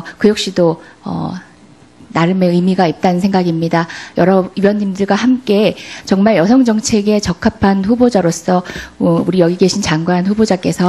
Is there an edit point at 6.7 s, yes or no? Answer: yes